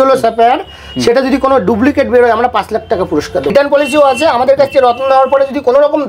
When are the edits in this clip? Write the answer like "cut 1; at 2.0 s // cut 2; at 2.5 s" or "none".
cut 1; at 3.5 s